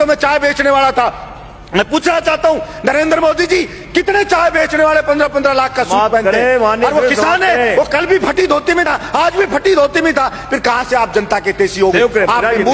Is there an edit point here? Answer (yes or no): no